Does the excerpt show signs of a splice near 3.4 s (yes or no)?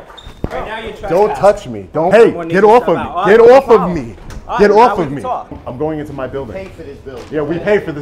no